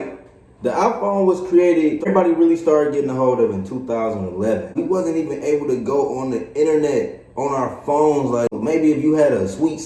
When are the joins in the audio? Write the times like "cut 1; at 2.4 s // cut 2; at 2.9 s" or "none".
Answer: cut 1; at 2.1 s // cut 2; at 4.8 s // cut 3; at 8.6 s